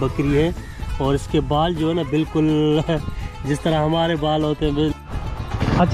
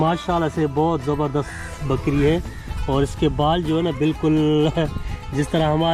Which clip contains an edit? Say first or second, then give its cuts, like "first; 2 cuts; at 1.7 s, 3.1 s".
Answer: first; 1 cut; at 5.0 s